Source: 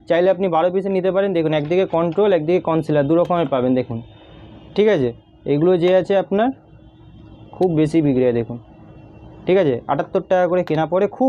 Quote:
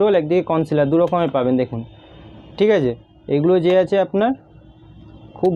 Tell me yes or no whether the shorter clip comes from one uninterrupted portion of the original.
yes